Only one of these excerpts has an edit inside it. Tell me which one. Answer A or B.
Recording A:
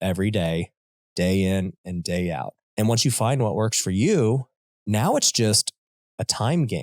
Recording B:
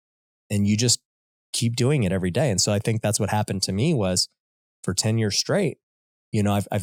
A